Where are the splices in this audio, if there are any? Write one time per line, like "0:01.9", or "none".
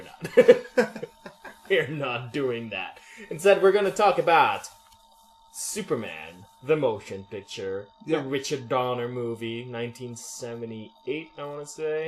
0:04.5